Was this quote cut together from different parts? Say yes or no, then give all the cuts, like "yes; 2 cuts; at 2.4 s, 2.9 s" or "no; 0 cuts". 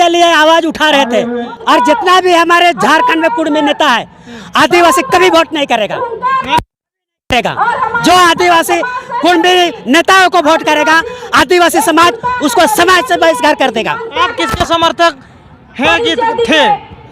yes; 2 cuts; at 1.5 s, 14.1 s